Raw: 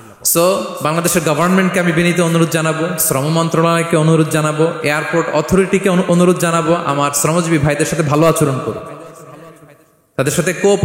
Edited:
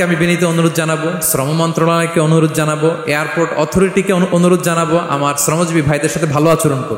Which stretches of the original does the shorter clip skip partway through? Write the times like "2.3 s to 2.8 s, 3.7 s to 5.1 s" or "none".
none